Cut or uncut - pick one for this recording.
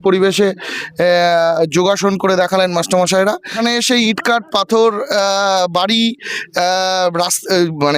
cut